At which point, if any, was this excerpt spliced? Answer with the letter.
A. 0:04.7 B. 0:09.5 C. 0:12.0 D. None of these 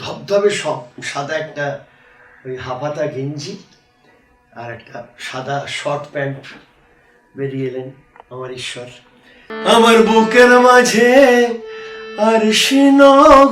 B